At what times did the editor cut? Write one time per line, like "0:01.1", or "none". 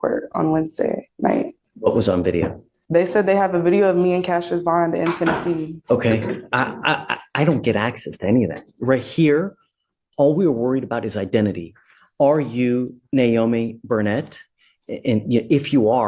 0:01.6
0:05.8